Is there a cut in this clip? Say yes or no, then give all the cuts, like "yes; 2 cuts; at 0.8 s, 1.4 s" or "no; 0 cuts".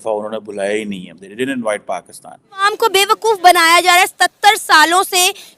yes; 1 cut; at 2.6 s